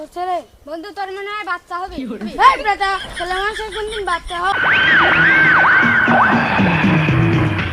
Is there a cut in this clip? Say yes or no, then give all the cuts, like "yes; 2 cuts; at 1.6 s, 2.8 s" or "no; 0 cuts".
yes; 1 cut; at 4.5 s